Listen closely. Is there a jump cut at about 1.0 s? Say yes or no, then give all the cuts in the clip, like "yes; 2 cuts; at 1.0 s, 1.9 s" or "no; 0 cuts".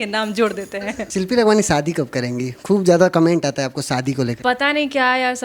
yes; 2 cuts; at 1.0 s, 4.4 s